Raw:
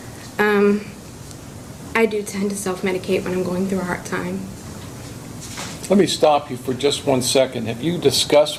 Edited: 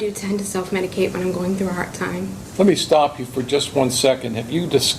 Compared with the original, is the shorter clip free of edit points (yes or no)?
no